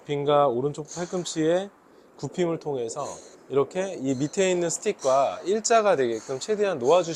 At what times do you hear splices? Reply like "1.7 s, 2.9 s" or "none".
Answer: none